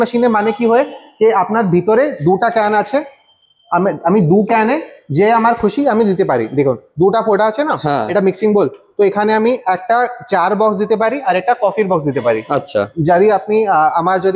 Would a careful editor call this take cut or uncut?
uncut